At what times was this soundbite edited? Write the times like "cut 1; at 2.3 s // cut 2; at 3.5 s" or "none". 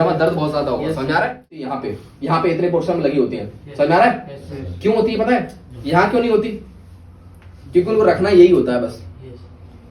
cut 1; at 1.7 s